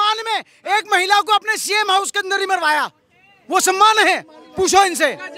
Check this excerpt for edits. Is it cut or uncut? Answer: uncut